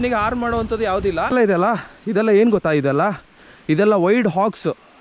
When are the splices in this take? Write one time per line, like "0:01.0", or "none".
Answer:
0:01.3